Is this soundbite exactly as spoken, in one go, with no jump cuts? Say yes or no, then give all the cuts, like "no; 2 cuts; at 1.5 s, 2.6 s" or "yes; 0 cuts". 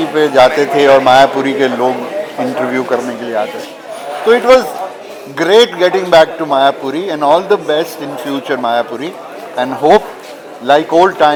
yes; 0 cuts